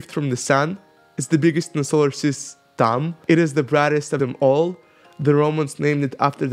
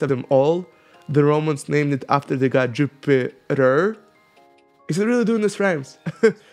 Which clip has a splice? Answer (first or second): first